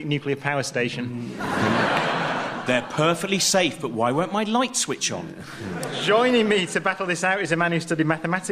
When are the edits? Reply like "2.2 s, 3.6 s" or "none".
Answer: none